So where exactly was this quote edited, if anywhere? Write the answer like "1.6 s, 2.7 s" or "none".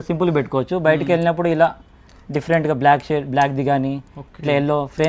none